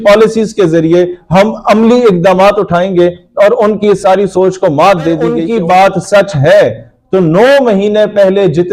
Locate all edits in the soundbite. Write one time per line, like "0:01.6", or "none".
0:05.4